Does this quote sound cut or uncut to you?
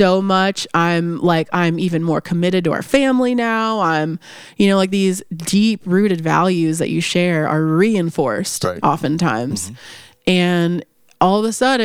uncut